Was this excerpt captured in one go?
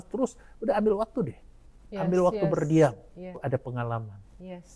no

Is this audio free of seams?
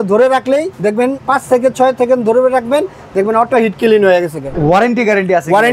no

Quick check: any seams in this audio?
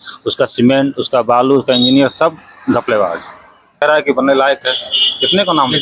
yes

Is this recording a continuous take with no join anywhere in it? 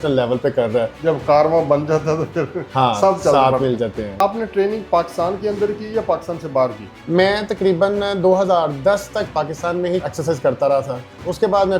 no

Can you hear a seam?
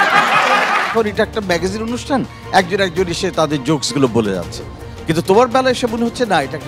yes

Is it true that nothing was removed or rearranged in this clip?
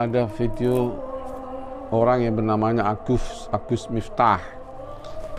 yes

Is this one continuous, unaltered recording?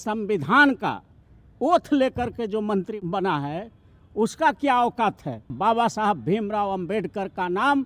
no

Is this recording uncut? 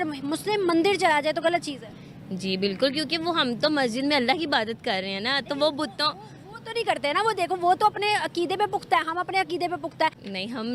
yes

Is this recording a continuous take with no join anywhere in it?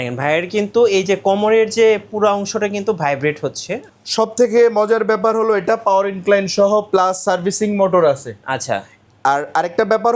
no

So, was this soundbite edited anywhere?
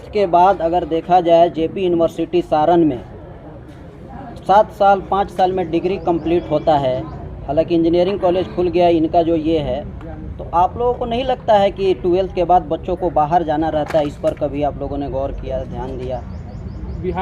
no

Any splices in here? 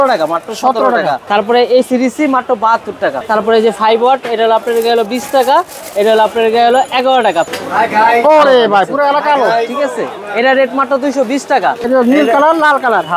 yes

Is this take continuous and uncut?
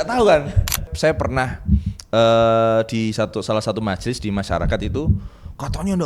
no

